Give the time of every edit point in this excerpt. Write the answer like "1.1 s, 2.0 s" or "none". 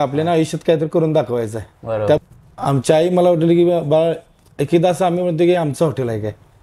2.2 s